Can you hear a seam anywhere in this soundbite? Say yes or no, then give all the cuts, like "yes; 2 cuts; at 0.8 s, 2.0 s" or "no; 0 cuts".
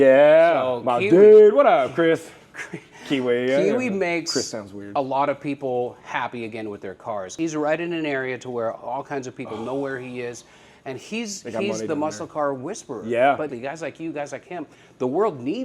yes; 2 cuts; at 7.3 s, 13.5 s